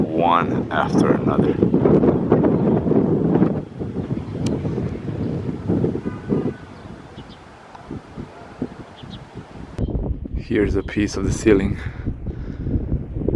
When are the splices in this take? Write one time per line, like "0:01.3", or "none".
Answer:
0:09.8